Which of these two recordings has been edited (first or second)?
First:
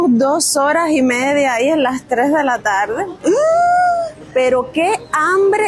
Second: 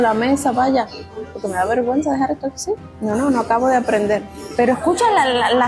second